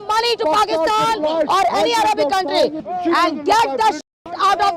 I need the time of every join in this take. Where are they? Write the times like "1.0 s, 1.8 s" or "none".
2.8 s